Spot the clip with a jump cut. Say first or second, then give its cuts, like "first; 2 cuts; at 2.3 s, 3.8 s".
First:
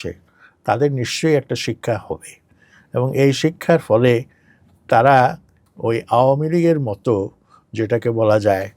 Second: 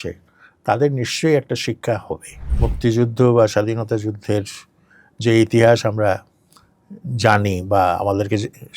second; 1 cut; at 2.6 s